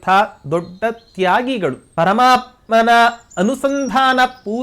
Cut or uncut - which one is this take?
cut